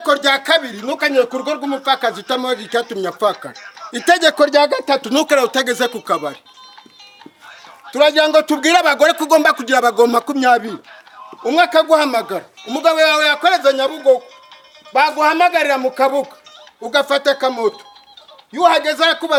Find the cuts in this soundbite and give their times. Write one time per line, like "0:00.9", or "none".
none